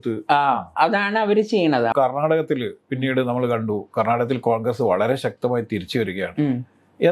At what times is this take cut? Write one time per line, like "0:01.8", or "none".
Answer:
0:01.9